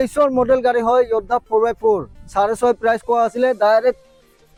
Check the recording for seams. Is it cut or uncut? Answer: uncut